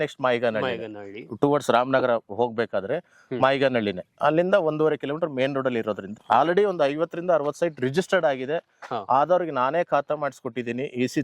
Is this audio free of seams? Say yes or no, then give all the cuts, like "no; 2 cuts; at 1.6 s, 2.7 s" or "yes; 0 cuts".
no; 1 cut; at 6.1 s